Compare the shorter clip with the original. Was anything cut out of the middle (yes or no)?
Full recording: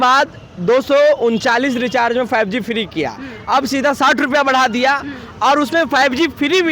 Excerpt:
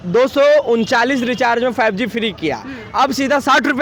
no